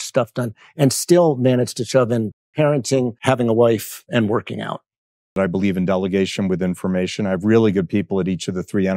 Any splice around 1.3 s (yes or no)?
no